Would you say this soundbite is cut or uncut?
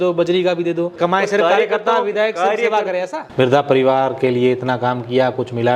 cut